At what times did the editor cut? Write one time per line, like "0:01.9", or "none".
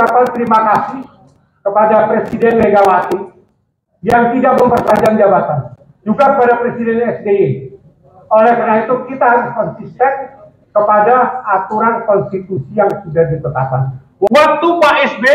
0:14.3